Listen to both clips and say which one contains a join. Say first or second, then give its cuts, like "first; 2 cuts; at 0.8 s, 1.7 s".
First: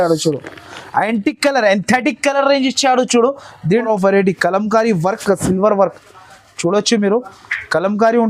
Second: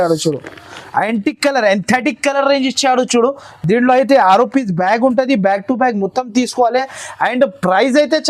first; 1 cut; at 3.7 s